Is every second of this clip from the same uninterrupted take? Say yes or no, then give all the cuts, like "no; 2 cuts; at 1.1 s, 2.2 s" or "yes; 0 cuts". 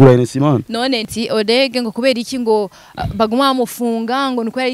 no; 1 cut; at 1.1 s